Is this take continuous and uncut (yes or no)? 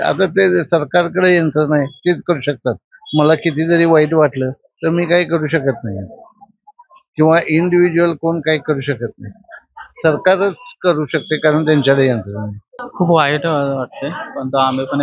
yes